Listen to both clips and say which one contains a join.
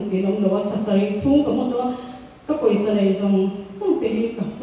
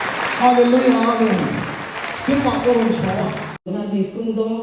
second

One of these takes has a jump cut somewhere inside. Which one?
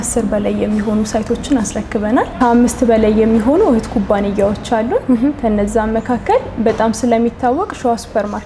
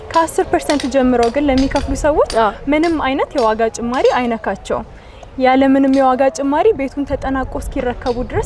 first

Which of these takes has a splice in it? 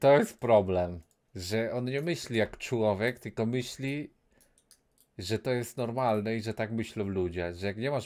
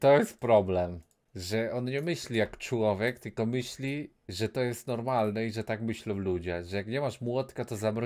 second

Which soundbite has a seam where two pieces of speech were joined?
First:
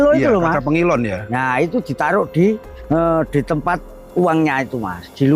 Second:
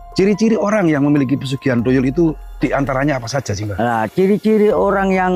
first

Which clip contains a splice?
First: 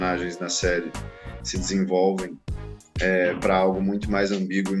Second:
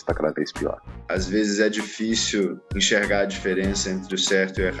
second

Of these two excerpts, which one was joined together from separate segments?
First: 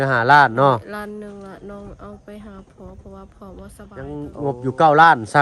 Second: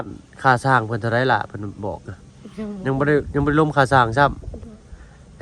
first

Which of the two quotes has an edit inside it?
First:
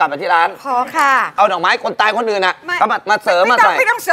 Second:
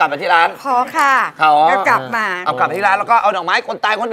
first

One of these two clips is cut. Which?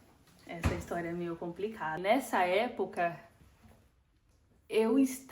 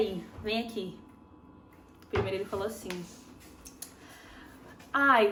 first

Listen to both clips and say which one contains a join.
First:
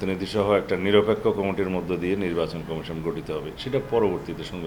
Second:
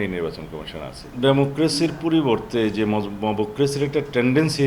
second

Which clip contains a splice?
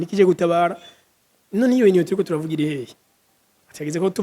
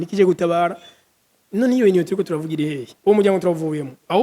second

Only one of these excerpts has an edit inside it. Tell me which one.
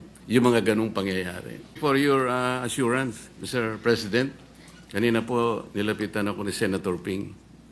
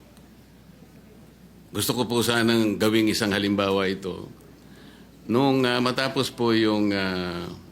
first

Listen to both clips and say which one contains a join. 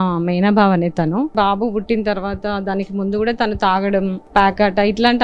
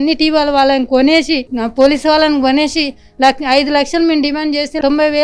first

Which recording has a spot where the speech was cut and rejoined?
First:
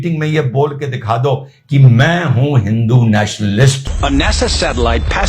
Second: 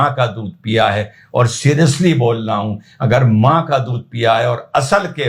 first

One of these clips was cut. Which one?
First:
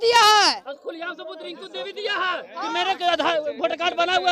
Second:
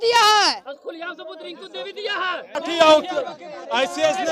second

